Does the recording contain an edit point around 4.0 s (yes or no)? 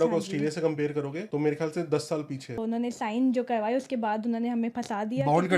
no